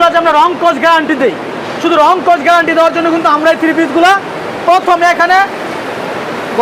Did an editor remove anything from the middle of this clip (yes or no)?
no